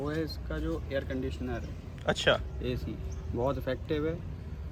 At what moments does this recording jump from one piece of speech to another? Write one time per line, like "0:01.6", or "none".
none